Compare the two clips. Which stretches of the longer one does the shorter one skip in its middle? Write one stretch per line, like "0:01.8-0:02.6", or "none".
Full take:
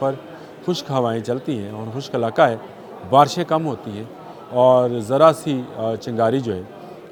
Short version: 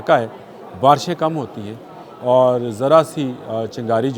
none